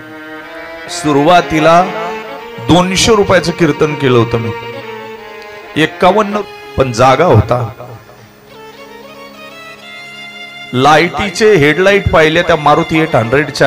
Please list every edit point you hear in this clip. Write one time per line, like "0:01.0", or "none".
0:06.3